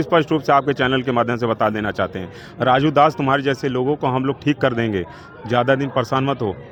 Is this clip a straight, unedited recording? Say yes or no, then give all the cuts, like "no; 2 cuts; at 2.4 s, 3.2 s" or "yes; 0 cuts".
yes; 0 cuts